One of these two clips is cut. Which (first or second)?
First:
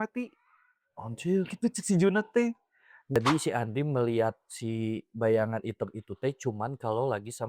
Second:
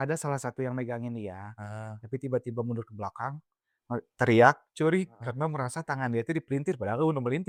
first